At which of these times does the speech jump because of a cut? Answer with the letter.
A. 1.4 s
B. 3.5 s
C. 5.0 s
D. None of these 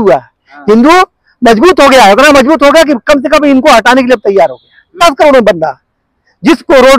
C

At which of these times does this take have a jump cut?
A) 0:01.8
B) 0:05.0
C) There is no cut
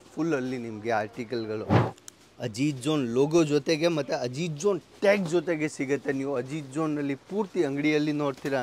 A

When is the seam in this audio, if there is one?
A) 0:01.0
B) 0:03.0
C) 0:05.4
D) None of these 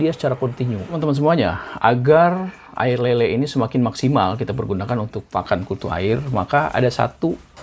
A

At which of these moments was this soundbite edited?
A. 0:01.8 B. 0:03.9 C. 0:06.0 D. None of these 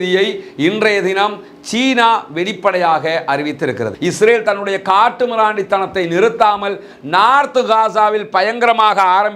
B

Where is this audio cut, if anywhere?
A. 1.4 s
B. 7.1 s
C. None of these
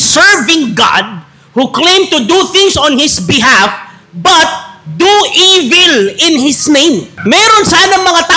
B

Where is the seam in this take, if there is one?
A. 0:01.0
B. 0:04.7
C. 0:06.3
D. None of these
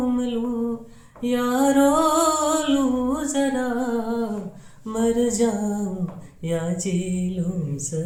D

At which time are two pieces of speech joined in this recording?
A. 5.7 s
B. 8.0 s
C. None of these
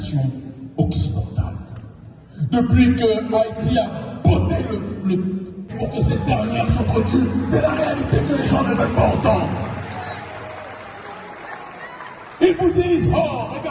A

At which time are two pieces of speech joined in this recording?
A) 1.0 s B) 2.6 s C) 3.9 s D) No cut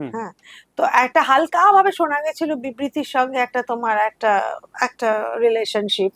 D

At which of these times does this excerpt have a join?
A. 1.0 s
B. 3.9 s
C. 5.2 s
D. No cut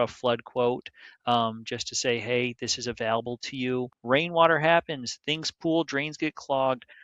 B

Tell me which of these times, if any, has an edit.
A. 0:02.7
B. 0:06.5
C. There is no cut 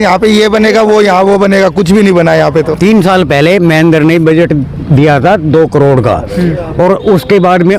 A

